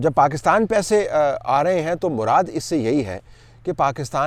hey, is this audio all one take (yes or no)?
yes